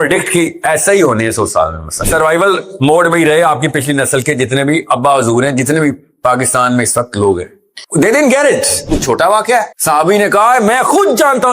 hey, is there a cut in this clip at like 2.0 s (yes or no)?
yes